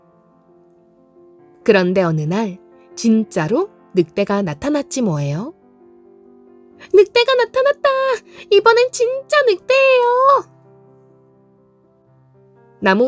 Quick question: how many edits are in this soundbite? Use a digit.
1